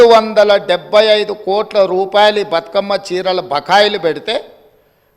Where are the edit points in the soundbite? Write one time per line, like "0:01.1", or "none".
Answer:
none